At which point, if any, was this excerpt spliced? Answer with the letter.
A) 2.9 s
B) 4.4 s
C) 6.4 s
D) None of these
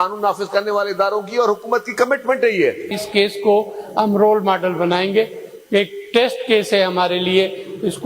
A